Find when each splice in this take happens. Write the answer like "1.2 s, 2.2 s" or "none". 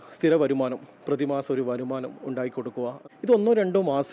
3.0 s